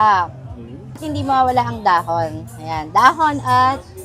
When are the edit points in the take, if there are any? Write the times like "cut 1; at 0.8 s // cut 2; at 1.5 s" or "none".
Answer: cut 1; at 1.0 s